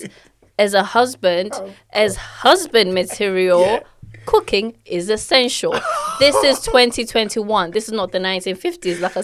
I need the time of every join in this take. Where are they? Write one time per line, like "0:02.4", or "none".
none